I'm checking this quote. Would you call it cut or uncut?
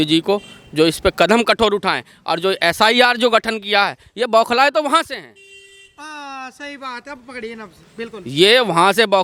uncut